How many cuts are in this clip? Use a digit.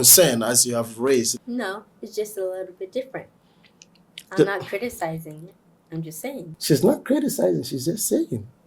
2